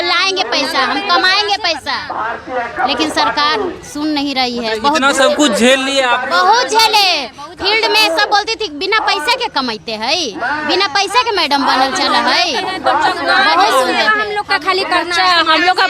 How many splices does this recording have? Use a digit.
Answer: 0